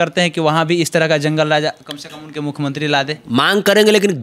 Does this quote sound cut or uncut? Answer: uncut